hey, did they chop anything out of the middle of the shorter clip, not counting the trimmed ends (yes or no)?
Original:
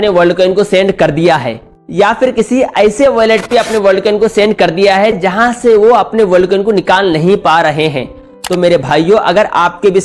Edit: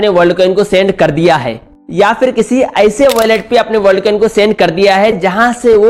no